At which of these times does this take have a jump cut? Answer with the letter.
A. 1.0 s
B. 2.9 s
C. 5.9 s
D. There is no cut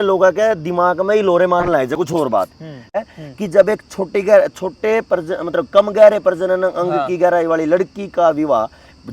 B